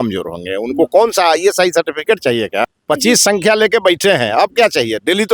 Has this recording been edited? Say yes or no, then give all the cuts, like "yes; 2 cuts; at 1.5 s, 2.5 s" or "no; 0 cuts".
yes; 1 cut; at 2.6 s